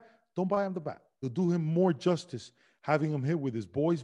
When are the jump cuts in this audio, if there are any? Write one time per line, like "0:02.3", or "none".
0:01.1